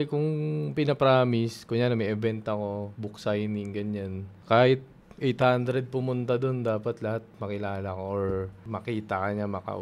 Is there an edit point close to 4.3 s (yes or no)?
yes